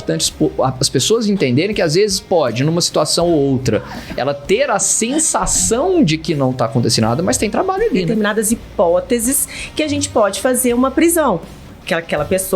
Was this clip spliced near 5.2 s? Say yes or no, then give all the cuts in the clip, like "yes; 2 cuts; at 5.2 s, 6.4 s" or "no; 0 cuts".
no; 1 cut; at 8.1 s